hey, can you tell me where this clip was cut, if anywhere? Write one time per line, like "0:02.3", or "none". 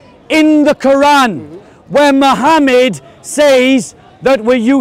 none